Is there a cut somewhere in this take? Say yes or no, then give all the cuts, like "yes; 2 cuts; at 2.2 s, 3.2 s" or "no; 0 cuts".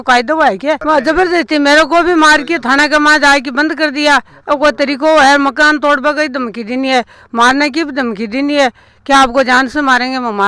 no; 0 cuts